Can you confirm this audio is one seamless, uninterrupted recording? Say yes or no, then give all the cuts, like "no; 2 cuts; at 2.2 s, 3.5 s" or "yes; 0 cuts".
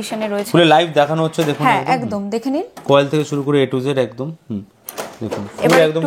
yes; 0 cuts